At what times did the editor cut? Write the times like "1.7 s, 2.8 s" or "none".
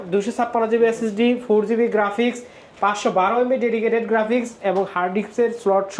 none